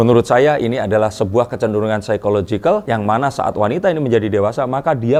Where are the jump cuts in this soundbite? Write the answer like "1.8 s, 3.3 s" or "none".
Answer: none